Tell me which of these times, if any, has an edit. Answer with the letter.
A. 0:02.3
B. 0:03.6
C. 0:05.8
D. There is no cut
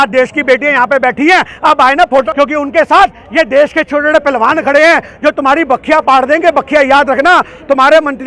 A